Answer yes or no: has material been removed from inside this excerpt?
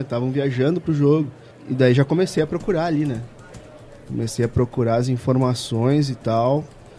no